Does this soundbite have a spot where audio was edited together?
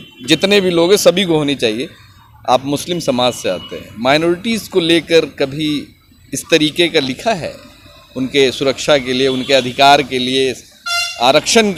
no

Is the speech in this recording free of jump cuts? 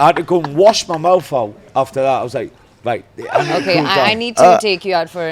yes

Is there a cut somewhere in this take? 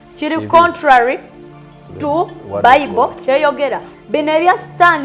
yes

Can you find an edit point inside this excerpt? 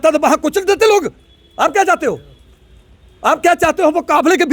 no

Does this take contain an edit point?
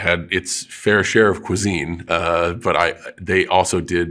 no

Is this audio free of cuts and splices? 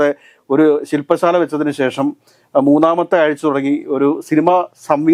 yes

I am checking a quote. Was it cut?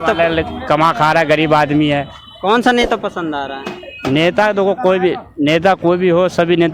no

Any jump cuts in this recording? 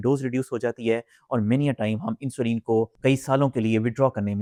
no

